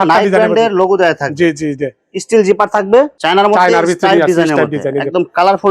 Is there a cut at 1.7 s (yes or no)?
no